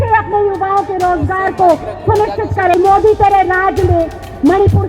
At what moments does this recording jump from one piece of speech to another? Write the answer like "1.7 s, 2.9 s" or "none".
2.7 s